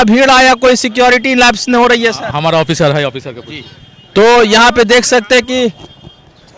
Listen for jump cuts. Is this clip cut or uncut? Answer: uncut